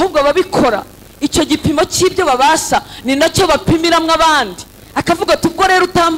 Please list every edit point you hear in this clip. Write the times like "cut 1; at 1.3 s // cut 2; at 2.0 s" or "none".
none